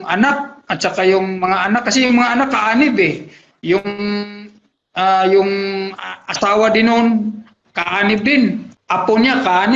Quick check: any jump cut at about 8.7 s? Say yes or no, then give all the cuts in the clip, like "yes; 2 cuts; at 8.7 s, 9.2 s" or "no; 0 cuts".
yes; 1 cut; at 8.7 s